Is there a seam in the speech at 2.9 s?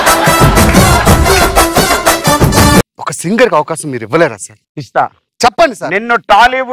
yes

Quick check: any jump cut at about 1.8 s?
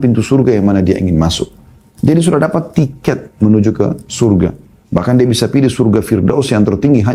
no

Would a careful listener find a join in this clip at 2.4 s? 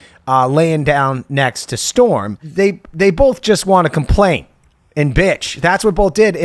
yes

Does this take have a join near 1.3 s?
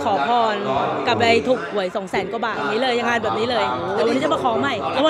no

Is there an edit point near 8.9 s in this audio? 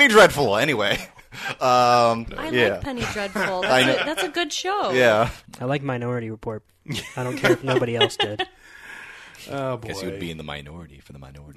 no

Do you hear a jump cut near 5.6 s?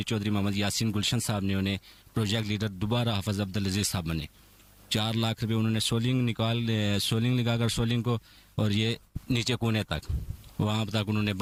no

